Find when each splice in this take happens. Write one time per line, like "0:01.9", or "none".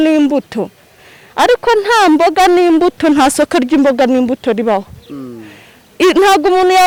none